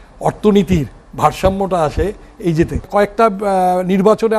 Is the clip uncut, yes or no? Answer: no